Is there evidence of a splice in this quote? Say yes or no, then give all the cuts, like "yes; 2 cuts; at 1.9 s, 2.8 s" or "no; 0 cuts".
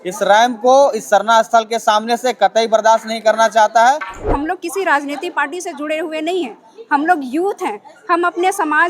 yes; 1 cut; at 4.2 s